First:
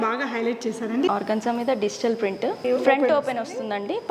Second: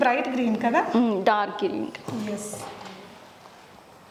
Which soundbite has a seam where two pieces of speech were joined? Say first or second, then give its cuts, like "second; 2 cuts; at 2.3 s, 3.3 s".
first; 2 cuts; at 1.1 s, 2.6 s